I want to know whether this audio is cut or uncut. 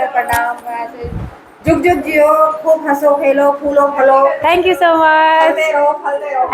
uncut